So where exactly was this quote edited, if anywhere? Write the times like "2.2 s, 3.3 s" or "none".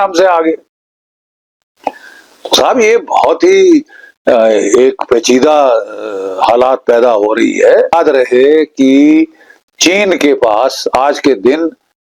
7.9 s